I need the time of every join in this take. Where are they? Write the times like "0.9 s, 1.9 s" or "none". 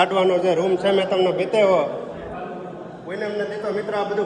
none